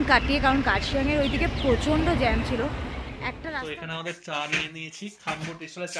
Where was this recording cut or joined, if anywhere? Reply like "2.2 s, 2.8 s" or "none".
3.5 s